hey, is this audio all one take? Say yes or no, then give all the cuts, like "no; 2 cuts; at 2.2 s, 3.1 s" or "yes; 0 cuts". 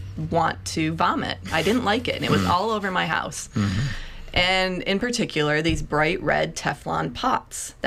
yes; 0 cuts